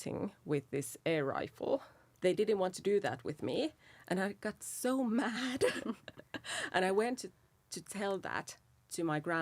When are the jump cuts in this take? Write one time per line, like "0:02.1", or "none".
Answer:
0:02.0